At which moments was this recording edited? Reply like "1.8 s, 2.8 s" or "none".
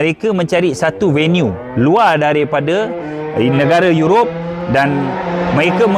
none